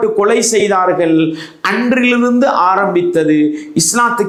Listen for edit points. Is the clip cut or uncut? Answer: uncut